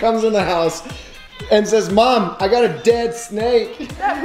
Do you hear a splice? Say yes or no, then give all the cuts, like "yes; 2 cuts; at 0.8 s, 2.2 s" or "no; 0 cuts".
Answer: no; 0 cuts